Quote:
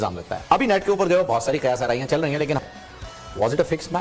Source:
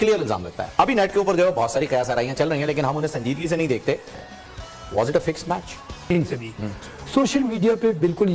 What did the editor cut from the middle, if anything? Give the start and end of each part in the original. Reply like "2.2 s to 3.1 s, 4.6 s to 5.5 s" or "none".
2.9 s to 4.1 s